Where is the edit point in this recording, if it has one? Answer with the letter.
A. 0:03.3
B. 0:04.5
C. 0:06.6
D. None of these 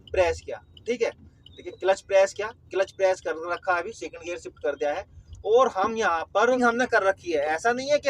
C